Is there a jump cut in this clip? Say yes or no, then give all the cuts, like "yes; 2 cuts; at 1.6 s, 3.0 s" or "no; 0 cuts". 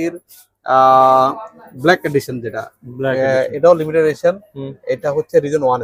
no; 0 cuts